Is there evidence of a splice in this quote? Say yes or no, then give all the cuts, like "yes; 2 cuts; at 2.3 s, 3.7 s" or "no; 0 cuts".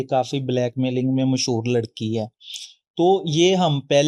no; 0 cuts